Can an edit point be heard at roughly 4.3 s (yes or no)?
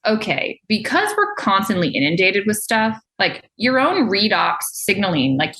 no